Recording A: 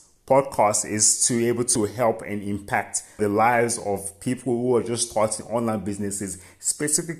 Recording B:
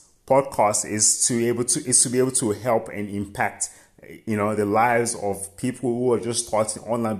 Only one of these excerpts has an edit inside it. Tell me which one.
A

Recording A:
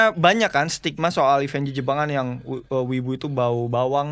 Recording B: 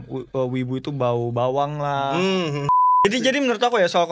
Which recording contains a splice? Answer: B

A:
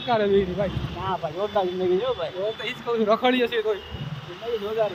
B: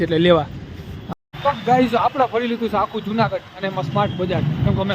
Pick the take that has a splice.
B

